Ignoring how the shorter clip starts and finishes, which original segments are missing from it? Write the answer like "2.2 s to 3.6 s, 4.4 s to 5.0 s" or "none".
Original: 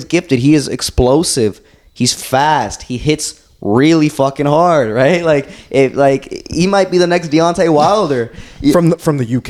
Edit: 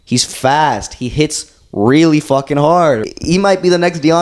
4.9 s to 6.3 s

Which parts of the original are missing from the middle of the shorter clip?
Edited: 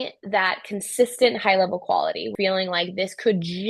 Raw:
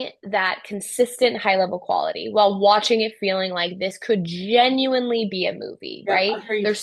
2.3 s to 3.1 s

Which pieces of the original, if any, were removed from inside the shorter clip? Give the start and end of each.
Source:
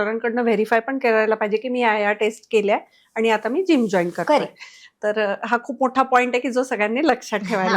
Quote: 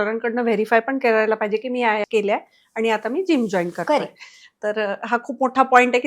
2.0 s to 2.4 s

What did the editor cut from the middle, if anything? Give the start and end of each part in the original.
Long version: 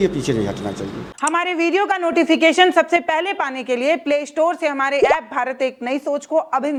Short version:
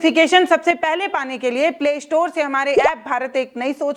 none

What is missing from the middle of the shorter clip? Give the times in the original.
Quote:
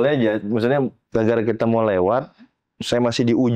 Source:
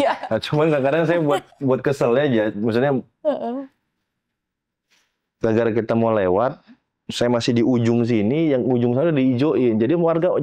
3.1 s to 5.3 s

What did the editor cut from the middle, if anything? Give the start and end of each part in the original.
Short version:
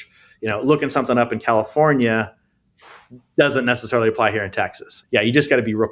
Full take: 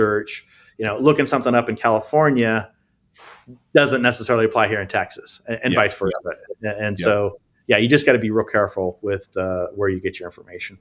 5.3 s to 7.5 s

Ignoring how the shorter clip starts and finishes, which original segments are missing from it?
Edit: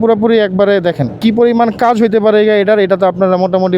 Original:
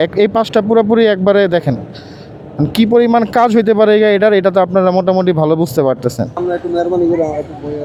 1.8 s to 2.7 s

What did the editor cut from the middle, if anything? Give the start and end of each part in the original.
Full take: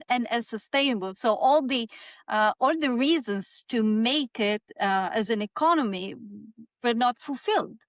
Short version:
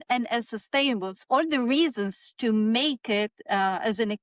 1.2 s to 2.5 s

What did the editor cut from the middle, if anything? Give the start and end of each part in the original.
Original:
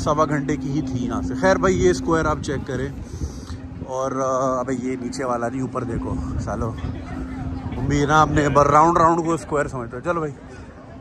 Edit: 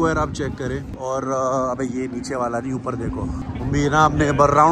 3.0 s to 3.8 s, 6.3 s to 7.6 s

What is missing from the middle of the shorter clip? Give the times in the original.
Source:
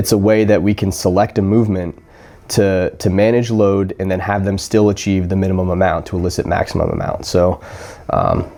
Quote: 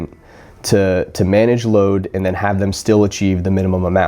none

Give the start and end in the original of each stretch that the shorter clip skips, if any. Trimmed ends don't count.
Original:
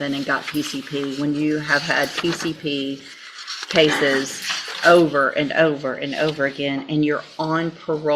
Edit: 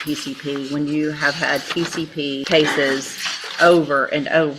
2.9 s to 3.7 s

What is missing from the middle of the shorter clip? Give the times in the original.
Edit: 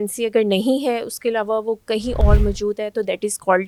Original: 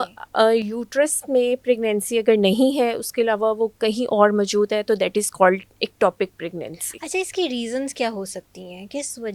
none

